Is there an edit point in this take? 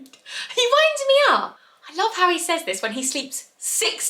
yes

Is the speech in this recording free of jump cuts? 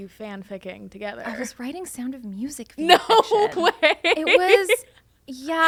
yes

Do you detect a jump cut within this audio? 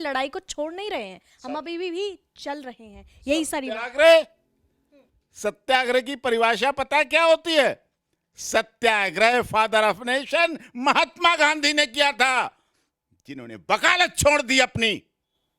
no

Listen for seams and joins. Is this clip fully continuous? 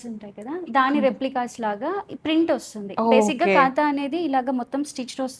yes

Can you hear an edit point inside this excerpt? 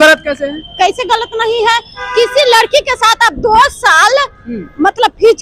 no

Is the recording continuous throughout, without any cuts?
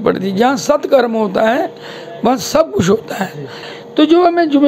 no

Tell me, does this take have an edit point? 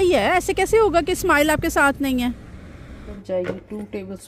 yes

